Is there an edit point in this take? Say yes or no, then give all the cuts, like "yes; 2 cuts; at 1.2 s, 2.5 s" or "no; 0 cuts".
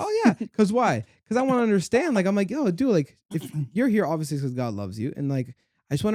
no; 0 cuts